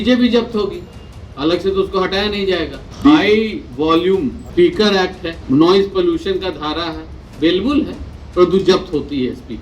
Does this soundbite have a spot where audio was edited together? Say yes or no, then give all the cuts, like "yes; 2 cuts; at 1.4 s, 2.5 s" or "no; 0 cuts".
yes; 3 cuts; at 2.8 s, 4.4 s, 5.3 s